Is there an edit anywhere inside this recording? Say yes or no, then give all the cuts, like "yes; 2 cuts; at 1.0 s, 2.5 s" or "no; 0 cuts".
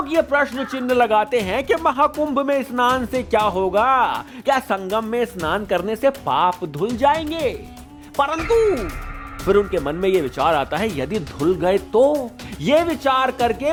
no; 0 cuts